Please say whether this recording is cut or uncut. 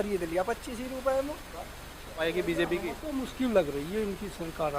cut